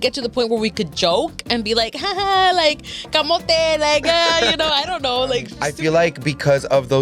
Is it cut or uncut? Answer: cut